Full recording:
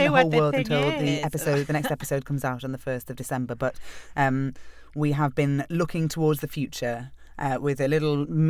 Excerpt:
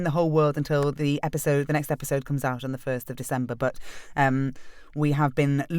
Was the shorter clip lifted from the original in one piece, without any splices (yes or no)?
yes